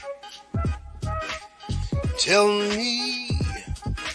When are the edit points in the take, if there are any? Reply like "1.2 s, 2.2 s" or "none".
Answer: 2.0 s